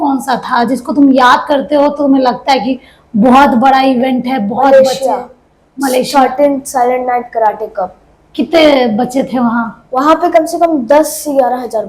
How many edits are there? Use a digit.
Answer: 0